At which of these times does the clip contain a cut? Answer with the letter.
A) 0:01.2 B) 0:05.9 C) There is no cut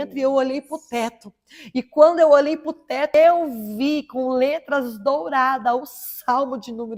C